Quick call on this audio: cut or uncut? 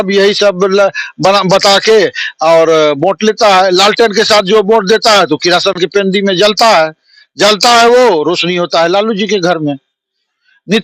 uncut